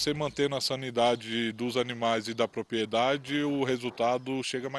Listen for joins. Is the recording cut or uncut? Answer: uncut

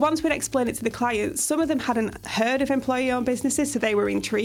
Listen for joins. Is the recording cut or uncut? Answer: uncut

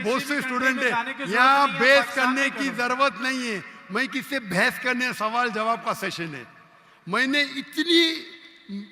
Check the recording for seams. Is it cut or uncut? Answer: uncut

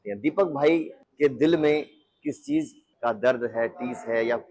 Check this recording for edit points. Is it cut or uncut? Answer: cut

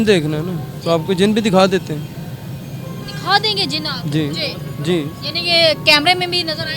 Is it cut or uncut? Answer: uncut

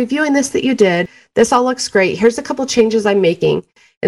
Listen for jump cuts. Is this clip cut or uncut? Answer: uncut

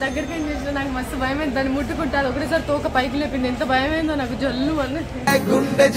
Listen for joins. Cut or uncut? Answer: uncut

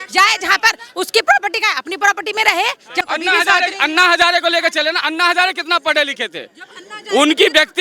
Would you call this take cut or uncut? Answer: cut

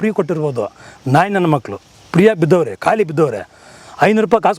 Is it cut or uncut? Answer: uncut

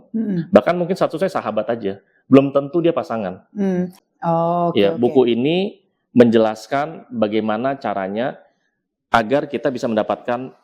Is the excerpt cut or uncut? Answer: cut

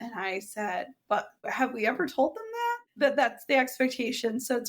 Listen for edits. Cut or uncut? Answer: cut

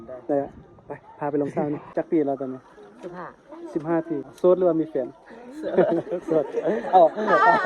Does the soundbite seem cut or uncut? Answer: cut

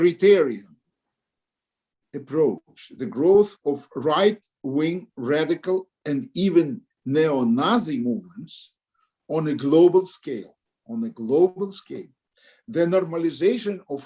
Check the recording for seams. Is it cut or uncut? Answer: uncut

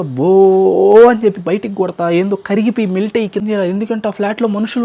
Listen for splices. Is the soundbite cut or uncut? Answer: cut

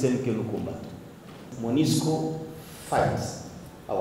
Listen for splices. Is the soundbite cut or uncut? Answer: cut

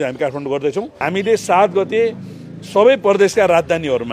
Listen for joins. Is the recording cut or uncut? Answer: cut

